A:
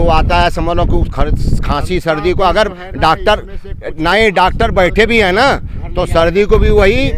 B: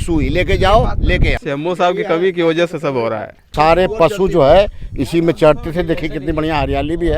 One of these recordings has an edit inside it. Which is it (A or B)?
B